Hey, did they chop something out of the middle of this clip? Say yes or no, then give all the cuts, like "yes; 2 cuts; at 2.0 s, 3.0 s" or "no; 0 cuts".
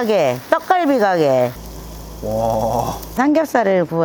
yes; 1 cut; at 3.2 s